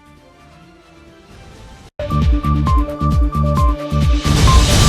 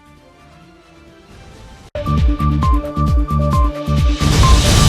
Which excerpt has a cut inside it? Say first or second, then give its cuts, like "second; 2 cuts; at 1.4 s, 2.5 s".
first; 1 cut; at 1.9 s